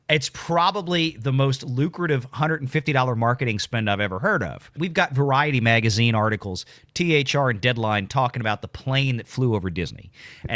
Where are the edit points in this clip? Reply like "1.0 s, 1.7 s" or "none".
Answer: 4.7 s